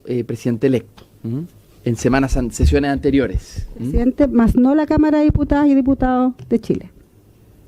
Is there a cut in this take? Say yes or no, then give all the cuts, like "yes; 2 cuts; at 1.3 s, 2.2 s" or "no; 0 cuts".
no; 0 cuts